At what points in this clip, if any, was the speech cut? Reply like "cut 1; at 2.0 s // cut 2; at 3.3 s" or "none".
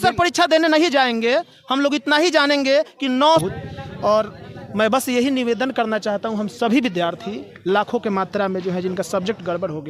cut 1; at 3.4 s